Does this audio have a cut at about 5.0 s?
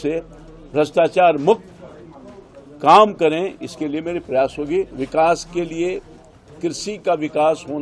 yes; 1 cut; at 5.0 s

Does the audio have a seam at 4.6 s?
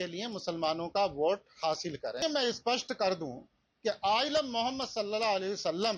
no; 1 cut; at 2.2 s

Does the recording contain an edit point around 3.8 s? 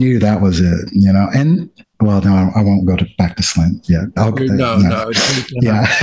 no; 0 cuts

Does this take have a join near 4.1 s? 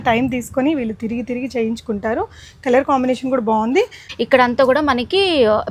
yes; 1 cut; at 4.1 s

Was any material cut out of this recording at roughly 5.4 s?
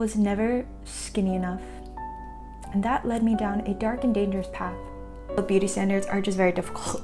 yes; 1 cut; at 5.4 s

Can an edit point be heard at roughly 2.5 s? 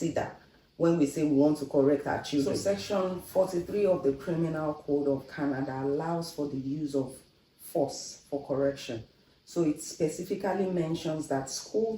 yes; 1 cut; at 2.5 s

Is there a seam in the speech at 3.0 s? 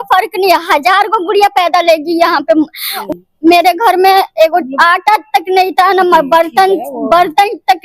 yes; 1 cut; at 3.0 s

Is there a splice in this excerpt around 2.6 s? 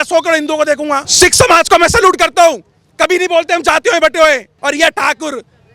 no; 2 cuts; at 1.1 s, 4.5 s

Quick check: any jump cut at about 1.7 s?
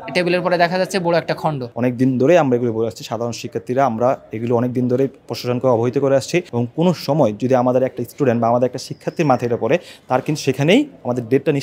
yes; 2 cuts; at 1.7 s, 6.5 s

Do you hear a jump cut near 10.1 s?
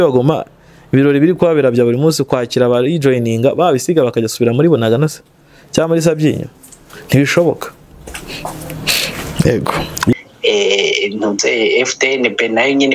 yes; 1 cut; at 10.1 s

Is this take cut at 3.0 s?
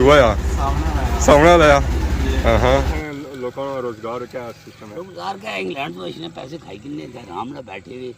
yes; 1 cut; at 3.0 s

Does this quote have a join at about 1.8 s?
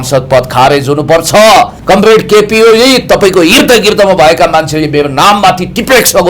yes; 1 cut; at 1.8 s

